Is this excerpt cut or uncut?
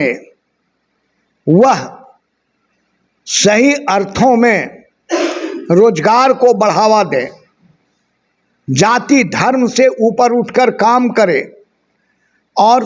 uncut